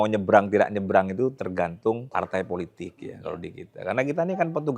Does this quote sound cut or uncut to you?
cut